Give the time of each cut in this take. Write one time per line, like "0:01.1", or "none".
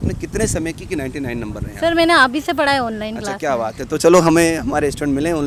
none